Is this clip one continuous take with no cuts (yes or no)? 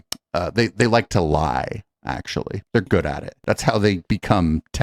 yes